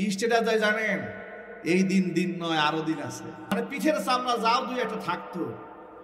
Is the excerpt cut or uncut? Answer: cut